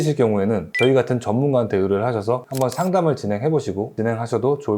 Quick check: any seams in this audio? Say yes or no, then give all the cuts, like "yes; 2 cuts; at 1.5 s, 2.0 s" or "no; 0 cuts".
no; 0 cuts